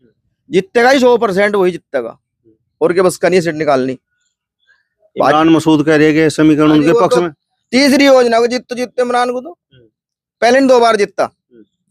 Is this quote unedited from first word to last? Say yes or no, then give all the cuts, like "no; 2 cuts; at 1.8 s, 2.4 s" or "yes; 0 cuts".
yes; 0 cuts